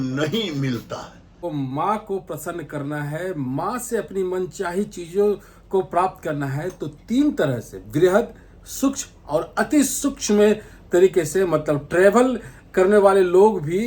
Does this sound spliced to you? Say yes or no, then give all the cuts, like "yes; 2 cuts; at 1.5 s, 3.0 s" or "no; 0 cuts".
yes; 1 cut; at 1.4 s